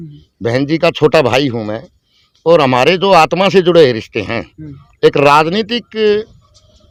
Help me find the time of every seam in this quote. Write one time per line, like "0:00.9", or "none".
none